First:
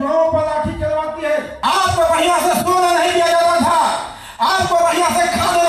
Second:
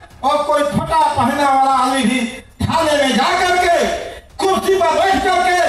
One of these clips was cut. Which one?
first; 1 cut; at 1.5 s

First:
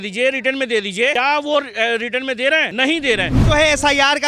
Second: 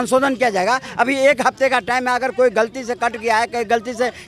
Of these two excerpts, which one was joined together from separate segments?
first; 2 cuts; at 1.1 s, 3.2 s

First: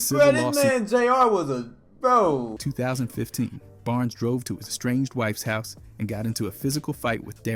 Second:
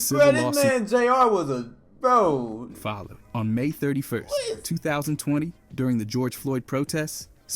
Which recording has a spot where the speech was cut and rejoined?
first; 1 cut; at 2.6 s

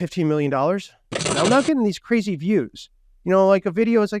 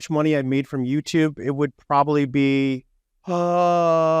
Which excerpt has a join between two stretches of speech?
first; 1 cut; at 1.3 s

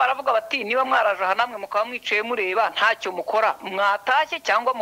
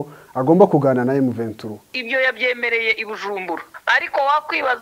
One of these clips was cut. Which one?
second; 2 cuts; at 2.0 s, 3.7 s

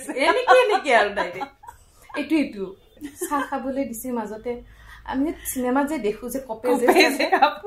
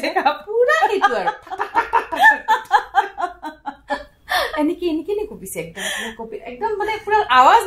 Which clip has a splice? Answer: first; 1 cut; at 3.0 s

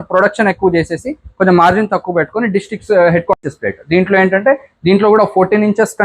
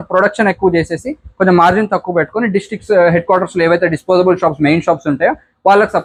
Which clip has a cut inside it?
first; 1 cut; at 3.4 s

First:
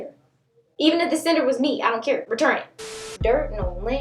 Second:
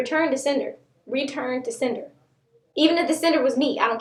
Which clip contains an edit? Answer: first; 1 cut; at 3.1 s

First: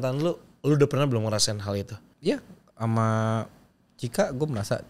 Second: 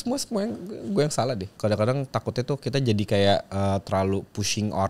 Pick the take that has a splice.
second; 1 cut; at 1.5 s

